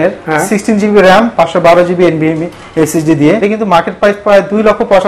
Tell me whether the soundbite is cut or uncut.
cut